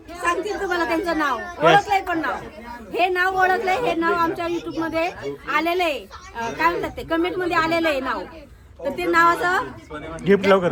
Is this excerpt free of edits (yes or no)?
yes